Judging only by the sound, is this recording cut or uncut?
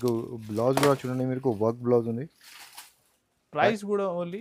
uncut